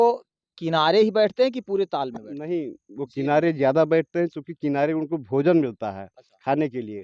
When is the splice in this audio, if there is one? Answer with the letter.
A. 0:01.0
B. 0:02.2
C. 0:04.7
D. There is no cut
D